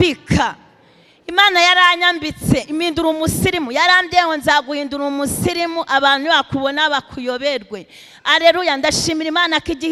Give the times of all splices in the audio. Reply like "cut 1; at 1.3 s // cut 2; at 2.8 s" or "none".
none